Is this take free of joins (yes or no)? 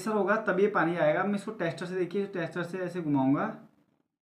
yes